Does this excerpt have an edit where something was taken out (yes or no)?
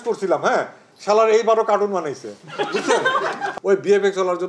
yes